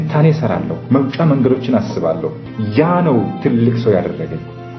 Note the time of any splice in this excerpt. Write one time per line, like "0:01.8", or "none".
0:02.5